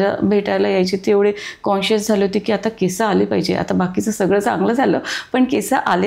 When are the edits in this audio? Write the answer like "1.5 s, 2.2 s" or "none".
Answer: none